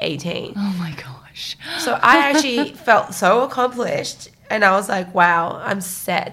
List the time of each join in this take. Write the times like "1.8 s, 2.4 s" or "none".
none